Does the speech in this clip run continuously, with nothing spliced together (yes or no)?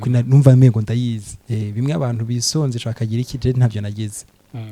no